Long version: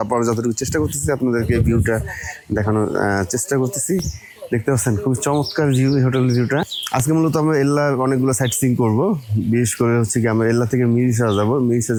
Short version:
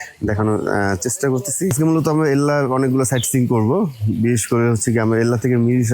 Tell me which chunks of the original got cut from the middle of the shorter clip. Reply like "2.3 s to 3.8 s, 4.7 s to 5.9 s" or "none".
4.0 s to 7.0 s